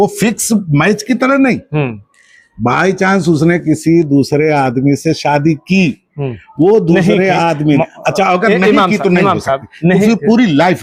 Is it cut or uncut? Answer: uncut